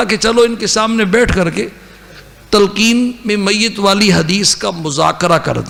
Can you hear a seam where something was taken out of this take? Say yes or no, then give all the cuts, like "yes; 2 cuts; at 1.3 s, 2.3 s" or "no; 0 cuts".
no; 0 cuts